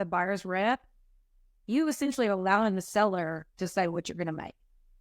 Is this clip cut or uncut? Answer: uncut